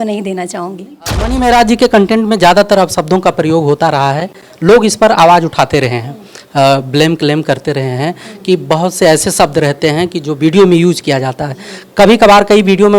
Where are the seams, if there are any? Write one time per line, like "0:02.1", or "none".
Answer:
0:01.1